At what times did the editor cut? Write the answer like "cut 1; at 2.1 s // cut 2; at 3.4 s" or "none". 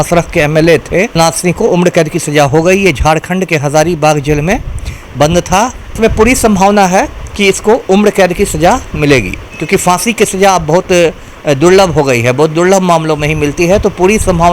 cut 1; at 1.2 s // cut 2; at 6.0 s

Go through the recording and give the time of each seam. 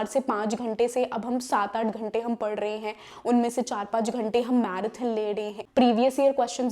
cut 1; at 5.6 s

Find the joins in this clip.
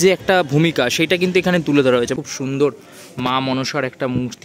cut 1; at 2.1 s

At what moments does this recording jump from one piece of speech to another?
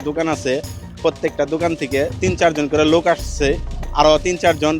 none

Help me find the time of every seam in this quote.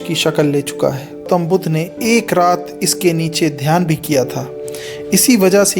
cut 1; at 1.3 s

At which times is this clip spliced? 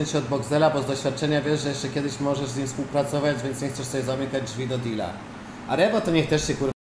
none

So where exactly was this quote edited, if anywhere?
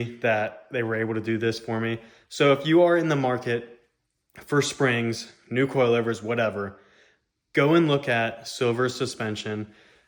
none

